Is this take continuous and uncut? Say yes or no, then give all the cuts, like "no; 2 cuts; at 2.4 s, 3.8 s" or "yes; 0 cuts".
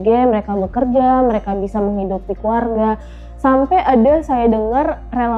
yes; 0 cuts